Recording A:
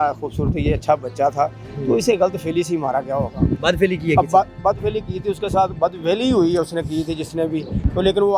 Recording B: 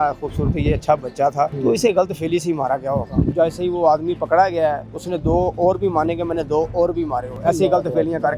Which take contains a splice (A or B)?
B